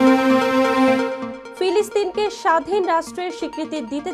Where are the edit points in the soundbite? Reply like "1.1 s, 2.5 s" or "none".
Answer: 1.3 s